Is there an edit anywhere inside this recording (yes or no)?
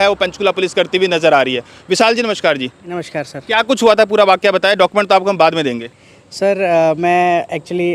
no